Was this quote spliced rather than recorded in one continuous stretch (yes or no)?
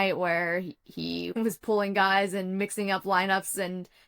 yes